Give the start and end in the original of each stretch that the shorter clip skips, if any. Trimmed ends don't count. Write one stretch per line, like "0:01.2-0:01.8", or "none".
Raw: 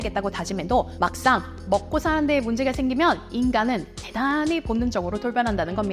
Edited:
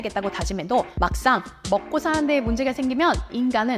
none